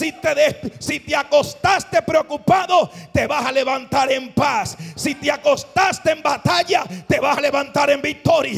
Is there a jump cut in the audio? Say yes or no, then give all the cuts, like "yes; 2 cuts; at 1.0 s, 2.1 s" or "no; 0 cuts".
no; 0 cuts